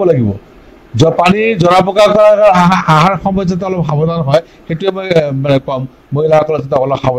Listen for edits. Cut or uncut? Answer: uncut